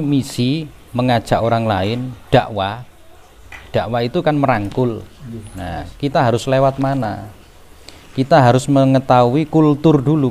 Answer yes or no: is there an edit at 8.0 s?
no